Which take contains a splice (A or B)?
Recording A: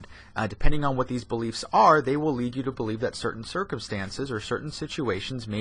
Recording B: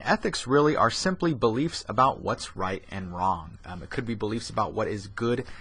B